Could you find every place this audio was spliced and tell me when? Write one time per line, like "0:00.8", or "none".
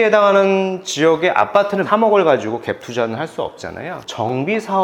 0:01.9
0:04.0